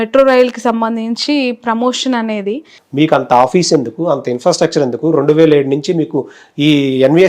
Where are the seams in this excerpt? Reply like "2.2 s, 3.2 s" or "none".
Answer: 2.8 s